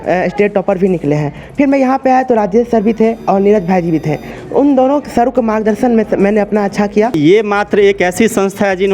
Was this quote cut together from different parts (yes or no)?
yes